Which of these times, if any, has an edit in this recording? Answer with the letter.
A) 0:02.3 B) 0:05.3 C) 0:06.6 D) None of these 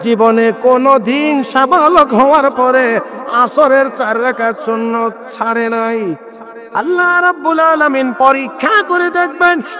C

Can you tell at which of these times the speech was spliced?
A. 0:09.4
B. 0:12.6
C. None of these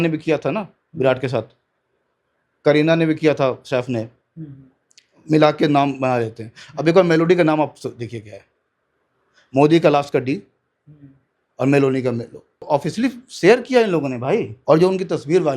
B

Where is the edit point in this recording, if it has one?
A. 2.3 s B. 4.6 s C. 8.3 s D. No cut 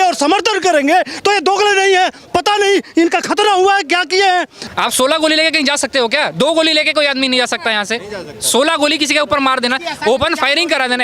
B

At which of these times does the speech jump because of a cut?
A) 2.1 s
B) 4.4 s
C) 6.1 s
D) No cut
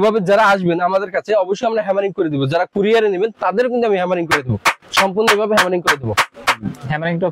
D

